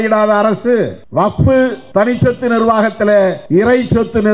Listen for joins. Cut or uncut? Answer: cut